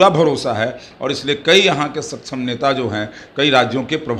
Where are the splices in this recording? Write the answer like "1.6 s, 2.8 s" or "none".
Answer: none